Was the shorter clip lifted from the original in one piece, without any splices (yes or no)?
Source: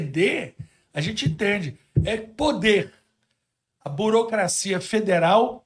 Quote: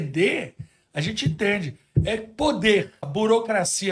no